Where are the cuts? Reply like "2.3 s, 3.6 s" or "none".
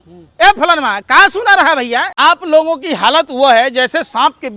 2.1 s